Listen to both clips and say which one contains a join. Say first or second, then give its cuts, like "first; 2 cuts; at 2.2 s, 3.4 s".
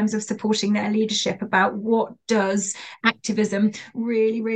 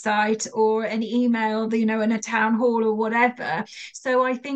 first; 1 cut; at 2.8 s